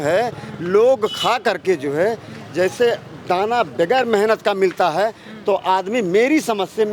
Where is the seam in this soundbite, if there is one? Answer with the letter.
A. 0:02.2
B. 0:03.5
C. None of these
C